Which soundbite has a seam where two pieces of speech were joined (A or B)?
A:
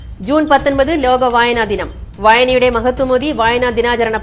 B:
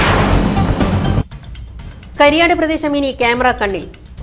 B